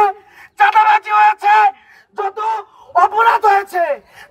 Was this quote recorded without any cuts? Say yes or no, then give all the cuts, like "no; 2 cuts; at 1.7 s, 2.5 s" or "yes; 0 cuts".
yes; 0 cuts